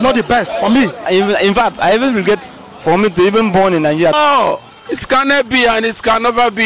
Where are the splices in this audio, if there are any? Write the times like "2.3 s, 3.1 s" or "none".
1.0 s, 4.1 s